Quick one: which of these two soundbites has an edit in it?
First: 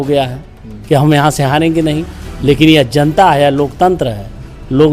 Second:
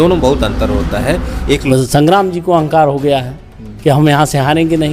second; 1 cut; at 1.7 s

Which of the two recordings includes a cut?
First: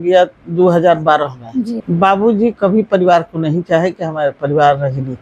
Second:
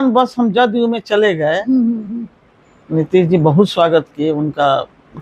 first; 1 cut; at 1.8 s

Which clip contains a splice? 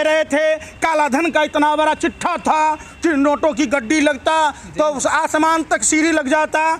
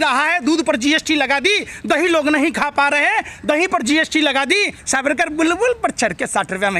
second; 1 cut; at 4.8 s

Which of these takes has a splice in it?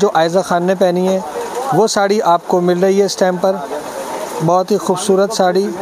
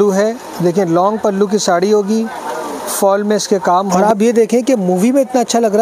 second; 1 cut; at 3.9 s

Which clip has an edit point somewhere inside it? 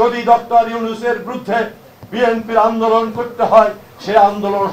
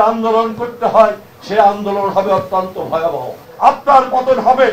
second; 1 cut; at 3.4 s

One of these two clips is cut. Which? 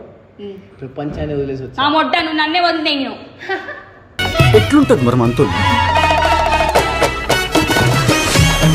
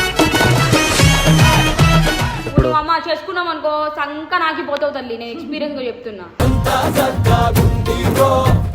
second; 1 cut; at 2.4 s

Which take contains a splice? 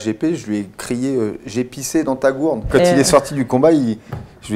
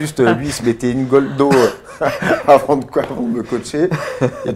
first; 1 cut; at 2.6 s

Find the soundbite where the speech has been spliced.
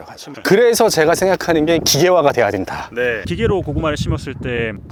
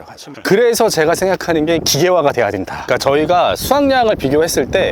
second; 1 cut; at 2.8 s

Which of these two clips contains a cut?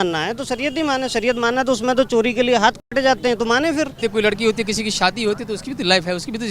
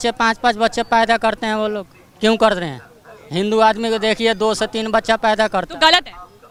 first; 1 cut; at 4.0 s

